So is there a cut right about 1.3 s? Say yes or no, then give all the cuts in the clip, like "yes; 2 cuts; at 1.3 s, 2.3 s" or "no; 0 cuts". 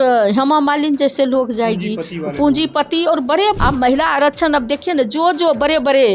no; 1 cut; at 3.6 s